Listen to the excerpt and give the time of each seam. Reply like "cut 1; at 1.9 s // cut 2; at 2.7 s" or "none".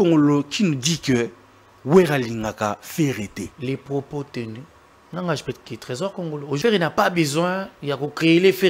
cut 1; at 3.5 s // cut 2; at 6.5 s